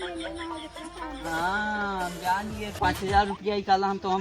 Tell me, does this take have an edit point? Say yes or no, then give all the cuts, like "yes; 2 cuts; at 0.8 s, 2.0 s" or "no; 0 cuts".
yes; 1 cut; at 2.7 s